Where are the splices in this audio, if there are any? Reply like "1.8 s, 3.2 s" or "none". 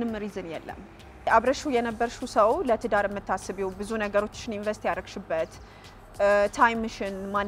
1.3 s